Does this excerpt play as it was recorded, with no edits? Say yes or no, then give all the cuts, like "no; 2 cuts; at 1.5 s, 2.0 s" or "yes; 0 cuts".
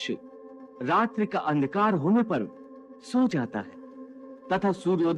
yes; 0 cuts